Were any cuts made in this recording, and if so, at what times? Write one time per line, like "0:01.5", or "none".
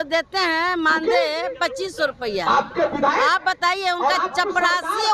none